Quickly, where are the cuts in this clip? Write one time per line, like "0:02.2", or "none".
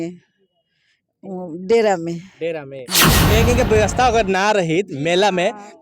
0:03.2